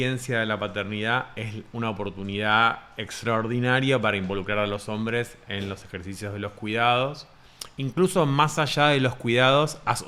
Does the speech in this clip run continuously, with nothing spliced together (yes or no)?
yes